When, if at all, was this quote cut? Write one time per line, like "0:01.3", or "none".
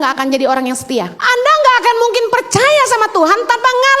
0:01.2

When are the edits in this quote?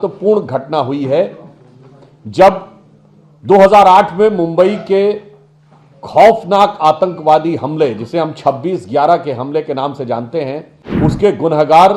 0:10.8

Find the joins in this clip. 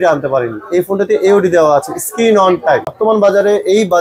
0:02.9

